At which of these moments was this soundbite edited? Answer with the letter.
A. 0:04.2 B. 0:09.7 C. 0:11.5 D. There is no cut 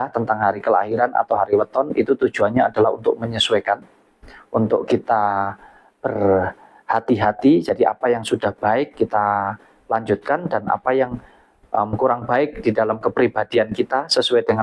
D